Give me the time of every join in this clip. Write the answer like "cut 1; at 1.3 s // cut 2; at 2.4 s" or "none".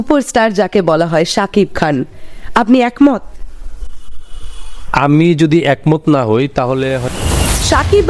cut 1; at 7.0 s